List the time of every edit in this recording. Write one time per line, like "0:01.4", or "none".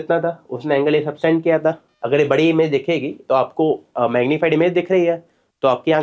0:01.9

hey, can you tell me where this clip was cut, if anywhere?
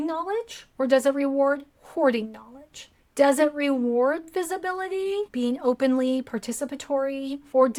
none

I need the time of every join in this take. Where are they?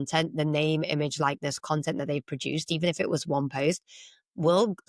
none

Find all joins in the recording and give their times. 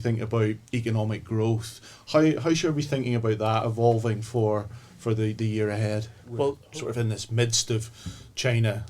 0:06.6

